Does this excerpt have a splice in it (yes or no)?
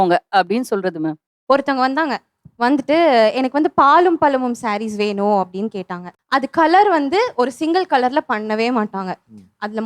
yes